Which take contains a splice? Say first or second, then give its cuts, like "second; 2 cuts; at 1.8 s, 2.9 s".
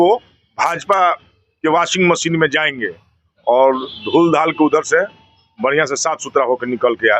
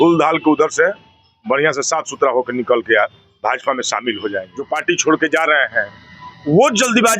second; 1 cut; at 4.6 s